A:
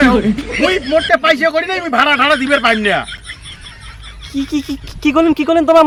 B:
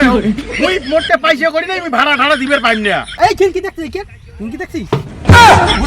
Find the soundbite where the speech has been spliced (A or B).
B